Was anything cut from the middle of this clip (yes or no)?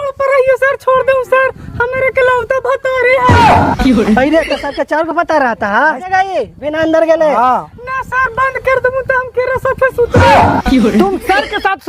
yes